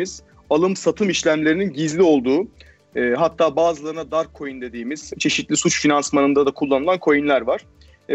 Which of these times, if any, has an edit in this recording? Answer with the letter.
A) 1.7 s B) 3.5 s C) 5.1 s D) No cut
C